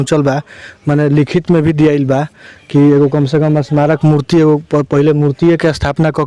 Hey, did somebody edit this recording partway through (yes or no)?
no